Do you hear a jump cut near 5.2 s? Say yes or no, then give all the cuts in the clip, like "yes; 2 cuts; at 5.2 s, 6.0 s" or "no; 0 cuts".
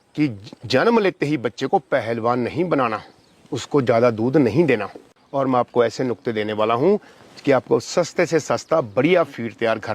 yes; 1 cut; at 5.2 s